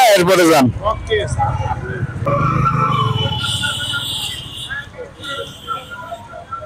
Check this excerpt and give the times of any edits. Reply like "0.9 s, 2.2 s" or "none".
2.3 s